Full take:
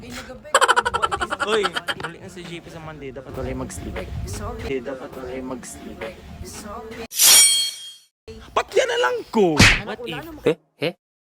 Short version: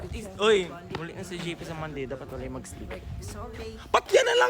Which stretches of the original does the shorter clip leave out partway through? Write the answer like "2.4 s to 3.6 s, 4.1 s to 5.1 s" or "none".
4.6 s to 8.2 s